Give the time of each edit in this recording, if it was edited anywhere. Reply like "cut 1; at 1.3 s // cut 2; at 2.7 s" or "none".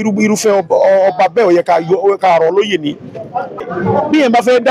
cut 1; at 3.7 s